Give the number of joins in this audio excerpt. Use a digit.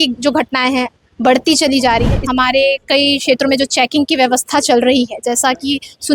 1